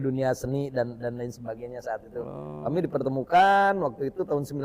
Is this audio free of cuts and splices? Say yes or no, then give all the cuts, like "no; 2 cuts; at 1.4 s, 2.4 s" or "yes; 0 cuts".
yes; 0 cuts